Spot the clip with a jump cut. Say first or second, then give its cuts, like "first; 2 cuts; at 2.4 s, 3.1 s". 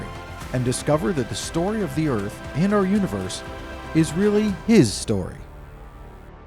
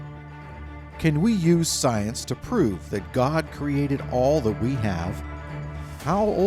first; 1 cut; at 5.4 s